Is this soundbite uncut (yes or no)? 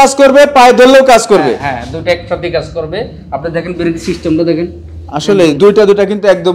yes